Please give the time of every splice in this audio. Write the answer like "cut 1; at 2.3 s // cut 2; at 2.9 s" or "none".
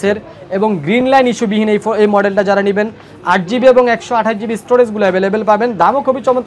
none